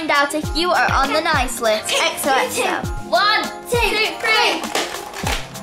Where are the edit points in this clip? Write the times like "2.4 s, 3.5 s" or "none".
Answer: 2.9 s